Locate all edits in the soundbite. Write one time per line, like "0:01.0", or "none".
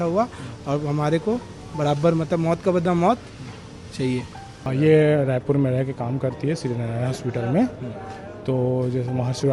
0:04.7

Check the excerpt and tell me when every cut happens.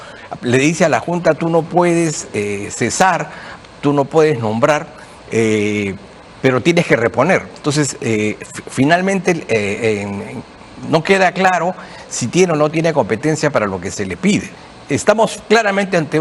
0:14.6

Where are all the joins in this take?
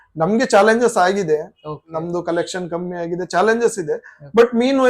none

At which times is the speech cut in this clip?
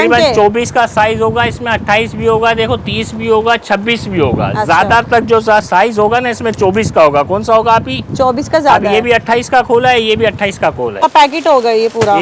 0:11.0

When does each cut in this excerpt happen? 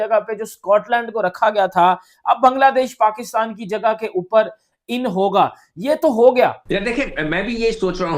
0:06.6

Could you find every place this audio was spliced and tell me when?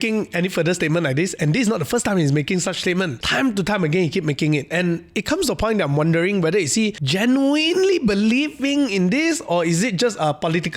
0:03.2
0:07.0

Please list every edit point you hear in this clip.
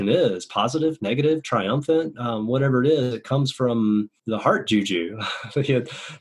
0:04.2

